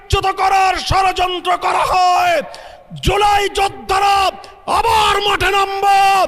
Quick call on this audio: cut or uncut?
uncut